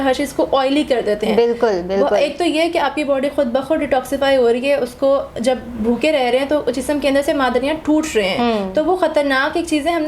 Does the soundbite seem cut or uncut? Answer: uncut